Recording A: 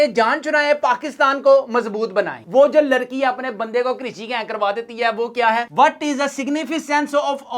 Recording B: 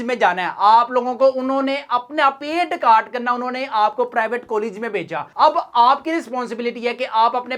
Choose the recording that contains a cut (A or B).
A